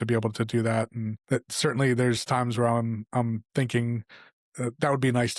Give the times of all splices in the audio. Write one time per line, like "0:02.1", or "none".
0:01.1